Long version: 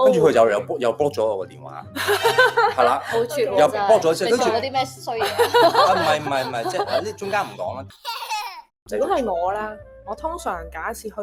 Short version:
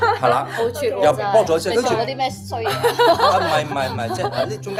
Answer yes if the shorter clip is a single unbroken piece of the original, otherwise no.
yes